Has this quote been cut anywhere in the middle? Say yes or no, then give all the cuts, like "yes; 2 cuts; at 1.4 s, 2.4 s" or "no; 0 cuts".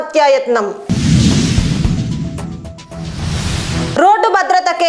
no; 0 cuts